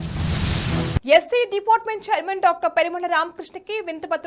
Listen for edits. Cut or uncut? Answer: cut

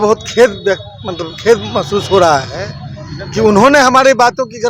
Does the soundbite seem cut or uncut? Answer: uncut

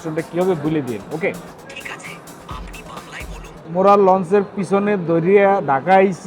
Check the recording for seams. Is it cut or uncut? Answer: cut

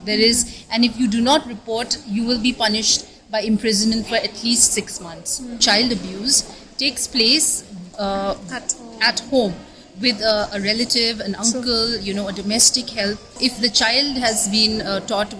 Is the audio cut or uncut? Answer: cut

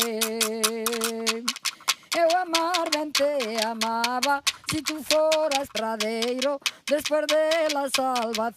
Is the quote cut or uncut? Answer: uncut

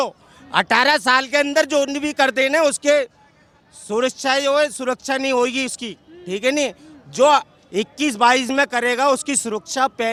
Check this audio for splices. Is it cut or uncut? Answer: uncut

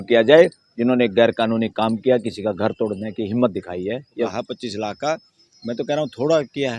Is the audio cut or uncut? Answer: cut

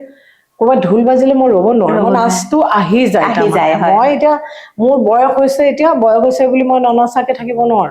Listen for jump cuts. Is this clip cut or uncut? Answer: uncut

